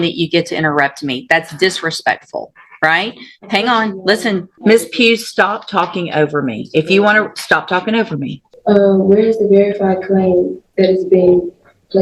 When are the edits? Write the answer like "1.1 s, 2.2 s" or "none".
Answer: 4.5 s, 8.4 s

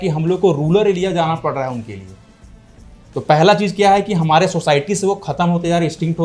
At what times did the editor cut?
none

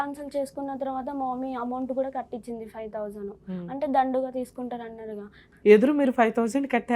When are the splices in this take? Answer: 5.4 s

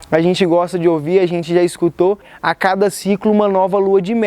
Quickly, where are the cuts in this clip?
2.3 s

